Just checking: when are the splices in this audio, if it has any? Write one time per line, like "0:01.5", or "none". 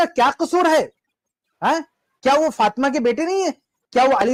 none